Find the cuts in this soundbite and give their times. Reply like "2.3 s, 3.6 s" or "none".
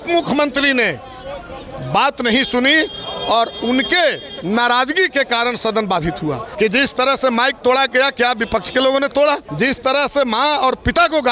6.4 s, 9.5 s